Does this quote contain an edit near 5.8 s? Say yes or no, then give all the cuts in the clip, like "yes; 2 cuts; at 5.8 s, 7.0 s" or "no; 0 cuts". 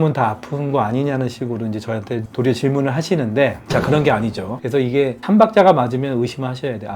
no; 1 cut; at 4.5 s